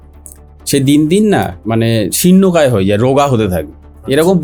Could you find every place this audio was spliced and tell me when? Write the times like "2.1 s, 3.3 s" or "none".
none